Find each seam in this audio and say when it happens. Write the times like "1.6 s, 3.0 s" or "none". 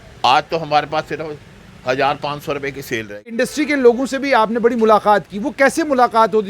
3.2 s